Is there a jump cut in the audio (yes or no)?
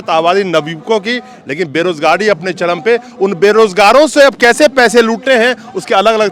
no